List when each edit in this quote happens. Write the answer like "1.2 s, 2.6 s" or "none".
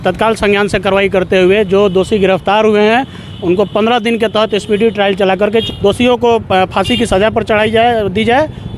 5.7 s

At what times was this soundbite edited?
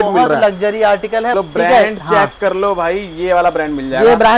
1.3 s

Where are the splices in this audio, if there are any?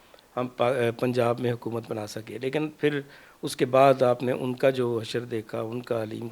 none

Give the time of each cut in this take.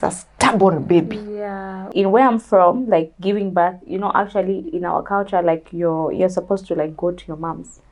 1.8 s

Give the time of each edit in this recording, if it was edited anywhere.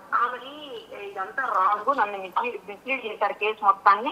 none

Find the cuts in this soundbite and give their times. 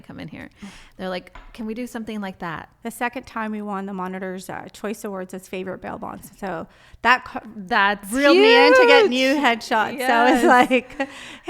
2.7 s

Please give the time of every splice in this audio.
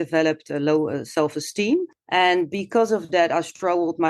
2.0 s

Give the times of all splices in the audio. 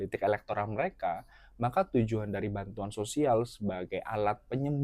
none

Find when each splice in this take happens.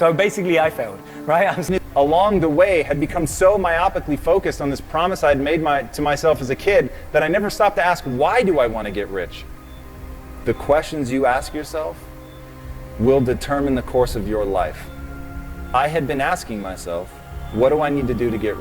1.6 s

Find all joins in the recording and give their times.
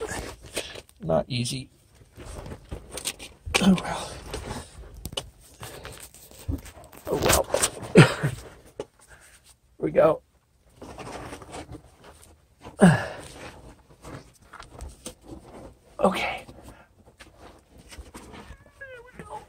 none

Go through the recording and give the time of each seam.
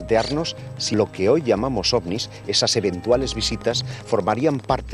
0.9 s

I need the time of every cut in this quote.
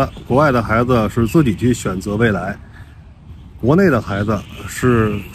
none

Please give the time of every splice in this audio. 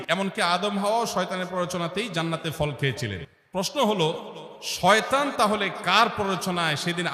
none

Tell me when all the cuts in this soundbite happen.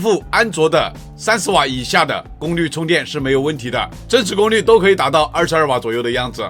none

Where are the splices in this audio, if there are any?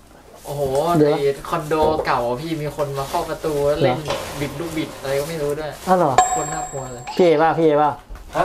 none

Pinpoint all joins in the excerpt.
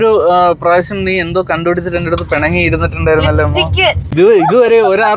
4.1 s

